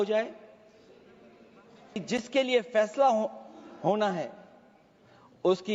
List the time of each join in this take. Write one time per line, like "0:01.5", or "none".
0:02.0

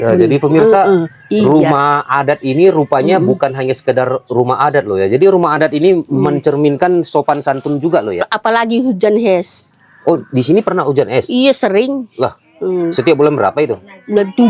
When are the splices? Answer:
0:08.2

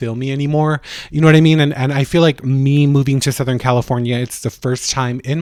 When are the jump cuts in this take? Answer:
none

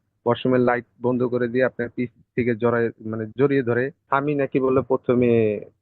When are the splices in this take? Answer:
0:04.0

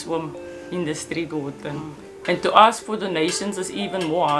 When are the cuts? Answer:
0:02.2

